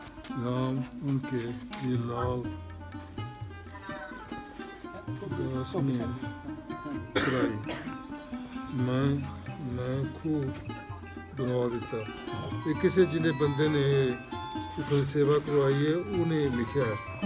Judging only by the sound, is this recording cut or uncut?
uncut